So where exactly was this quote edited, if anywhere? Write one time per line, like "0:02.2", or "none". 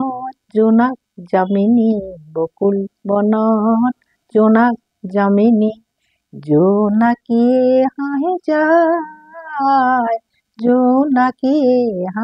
none